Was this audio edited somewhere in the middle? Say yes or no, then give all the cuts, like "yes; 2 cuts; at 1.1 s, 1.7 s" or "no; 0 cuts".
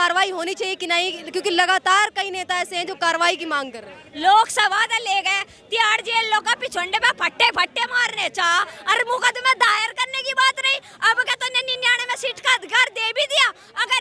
no; 0 cuts